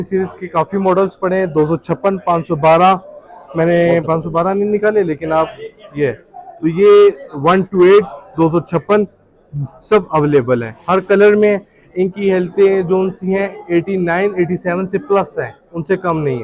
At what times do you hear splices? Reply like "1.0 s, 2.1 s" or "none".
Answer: none